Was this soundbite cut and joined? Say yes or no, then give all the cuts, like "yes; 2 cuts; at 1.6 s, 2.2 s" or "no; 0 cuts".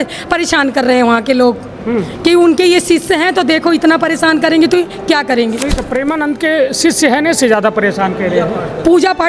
no; 0 cuts